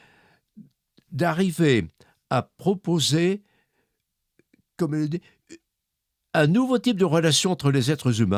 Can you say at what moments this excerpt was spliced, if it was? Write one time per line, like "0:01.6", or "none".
none